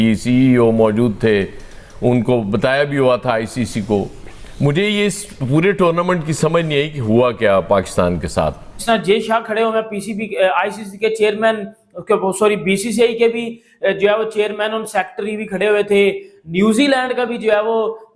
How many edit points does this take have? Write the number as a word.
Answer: one